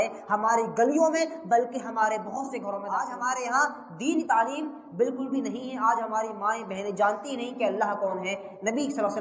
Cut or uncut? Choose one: cut